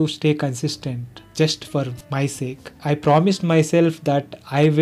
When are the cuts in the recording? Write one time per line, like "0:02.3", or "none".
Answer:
0:02.8